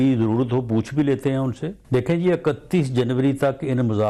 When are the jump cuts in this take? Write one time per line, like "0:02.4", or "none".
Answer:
0:01.7